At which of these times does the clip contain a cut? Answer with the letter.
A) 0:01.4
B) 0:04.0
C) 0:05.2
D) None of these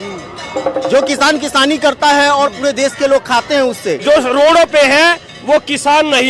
B